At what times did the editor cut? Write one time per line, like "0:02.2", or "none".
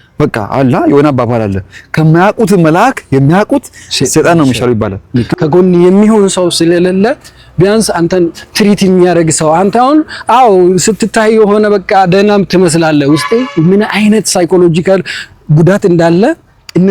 0:05.3

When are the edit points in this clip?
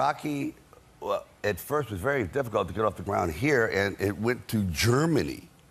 0:01.5

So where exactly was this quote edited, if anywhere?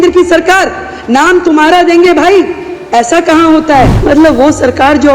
0:04.0

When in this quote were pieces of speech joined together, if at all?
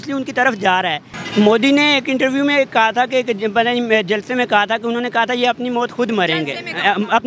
0:01.1

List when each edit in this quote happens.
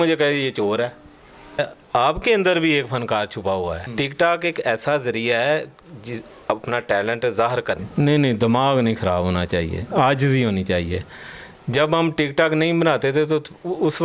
0:01.6
0:03.8
0:07.9

